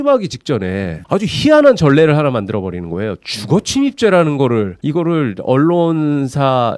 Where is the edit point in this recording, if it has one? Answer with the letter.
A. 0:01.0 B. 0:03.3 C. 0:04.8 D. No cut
D